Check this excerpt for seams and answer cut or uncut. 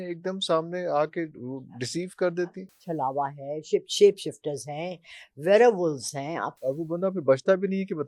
cut